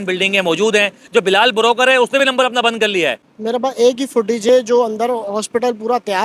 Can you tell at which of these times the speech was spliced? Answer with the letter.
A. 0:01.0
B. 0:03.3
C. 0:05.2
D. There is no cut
B